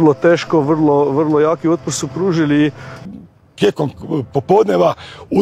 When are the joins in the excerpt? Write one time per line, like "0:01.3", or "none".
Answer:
0:02.9